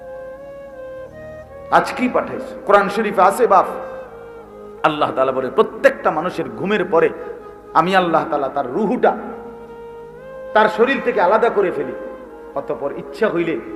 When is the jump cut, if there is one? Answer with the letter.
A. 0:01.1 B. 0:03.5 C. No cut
A